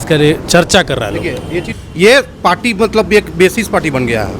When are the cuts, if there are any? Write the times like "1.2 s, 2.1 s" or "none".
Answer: 1.8 s

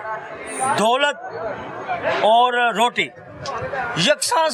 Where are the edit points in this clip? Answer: none

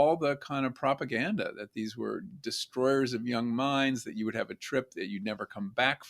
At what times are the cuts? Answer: none

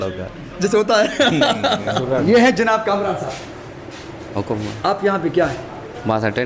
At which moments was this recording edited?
1.8 s

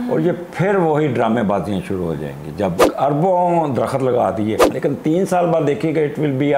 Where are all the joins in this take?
2.8 s, 4.7 s

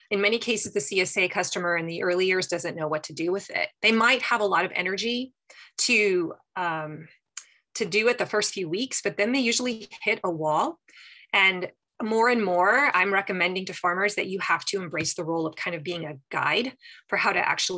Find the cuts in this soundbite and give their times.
none

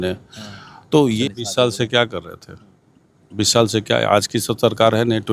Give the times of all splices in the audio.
1.2 s

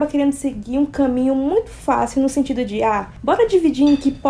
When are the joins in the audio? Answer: 3.1 s

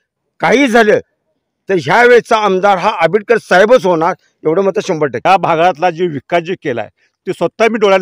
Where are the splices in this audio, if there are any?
5.2 s

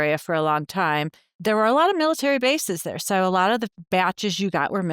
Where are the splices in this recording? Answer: 1.3 s

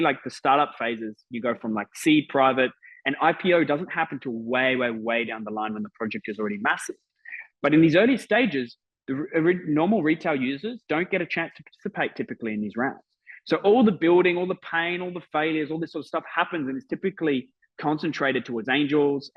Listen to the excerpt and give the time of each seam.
none

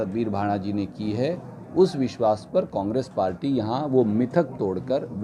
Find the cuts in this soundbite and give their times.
none

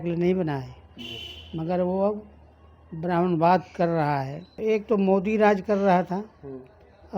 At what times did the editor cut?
4.4 s

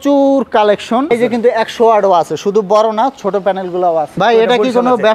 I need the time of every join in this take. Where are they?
1.1 s, 4.1 s

